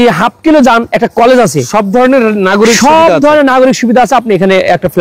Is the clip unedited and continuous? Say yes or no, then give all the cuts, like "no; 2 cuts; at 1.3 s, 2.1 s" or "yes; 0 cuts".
yes; 0 cuts